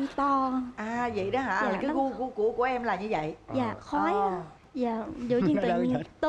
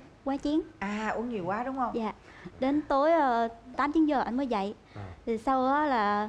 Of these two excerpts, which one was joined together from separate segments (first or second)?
first